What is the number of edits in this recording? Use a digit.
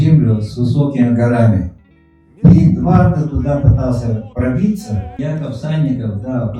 1